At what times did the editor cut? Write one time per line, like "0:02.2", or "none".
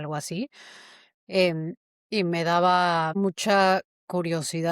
0:03.1